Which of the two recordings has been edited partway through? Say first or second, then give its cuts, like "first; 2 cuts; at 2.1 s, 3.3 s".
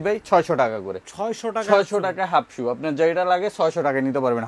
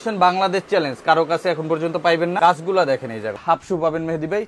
second; 2 cuts; at 2.4 s, 3.4 s